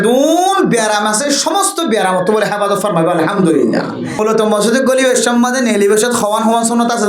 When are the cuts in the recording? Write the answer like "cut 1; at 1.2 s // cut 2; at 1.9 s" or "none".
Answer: cut 1; at 4.3 s